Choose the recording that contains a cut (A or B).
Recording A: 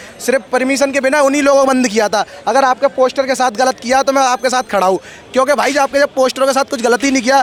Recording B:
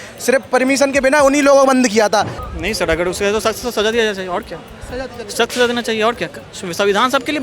B